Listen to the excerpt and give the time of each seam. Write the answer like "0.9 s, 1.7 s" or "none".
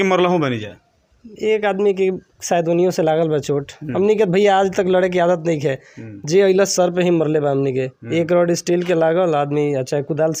none